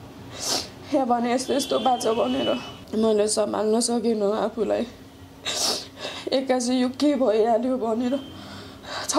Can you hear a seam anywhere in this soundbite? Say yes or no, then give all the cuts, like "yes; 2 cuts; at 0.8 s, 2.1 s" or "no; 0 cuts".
yes; 1 cut; at 2.8 s